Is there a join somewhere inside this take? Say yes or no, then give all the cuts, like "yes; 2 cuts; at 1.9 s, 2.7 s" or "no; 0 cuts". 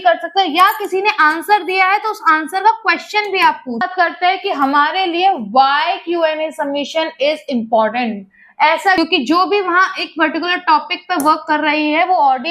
yes; 2 cuts; at 3.9 s, 9.0 s